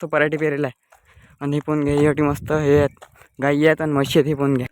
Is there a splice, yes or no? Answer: no